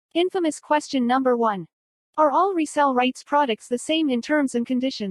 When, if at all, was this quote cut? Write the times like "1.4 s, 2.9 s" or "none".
none